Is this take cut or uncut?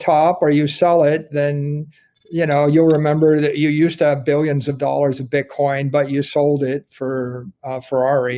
uncut